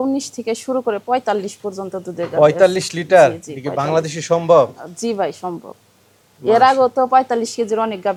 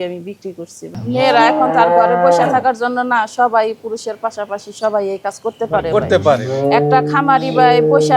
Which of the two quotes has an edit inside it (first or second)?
second